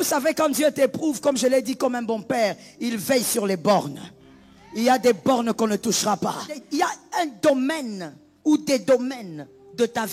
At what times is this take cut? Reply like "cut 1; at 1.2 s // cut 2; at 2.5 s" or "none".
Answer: cut 1; at 6.5 s